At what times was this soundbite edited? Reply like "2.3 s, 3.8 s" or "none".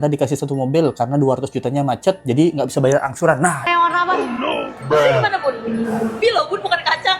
3.7 s, 6.2 s